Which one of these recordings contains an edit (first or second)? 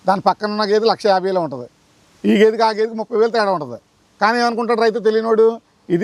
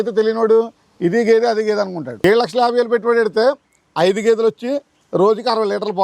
second